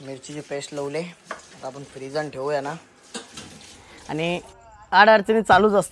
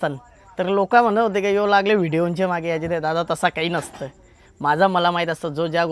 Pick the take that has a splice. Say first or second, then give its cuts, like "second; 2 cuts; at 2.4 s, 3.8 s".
first; 1 cut; at 3.9 s